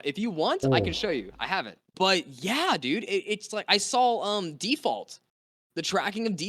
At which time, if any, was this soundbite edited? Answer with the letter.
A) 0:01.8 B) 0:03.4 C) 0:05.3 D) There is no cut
A